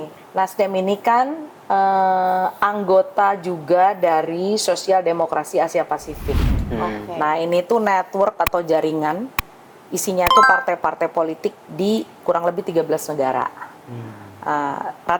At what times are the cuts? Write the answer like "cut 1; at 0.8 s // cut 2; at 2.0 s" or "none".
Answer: none